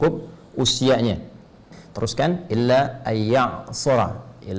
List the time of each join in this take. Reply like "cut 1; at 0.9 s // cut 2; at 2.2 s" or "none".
cut 1; at 1.7 s